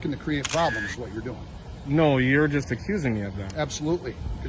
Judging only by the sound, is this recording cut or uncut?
uncut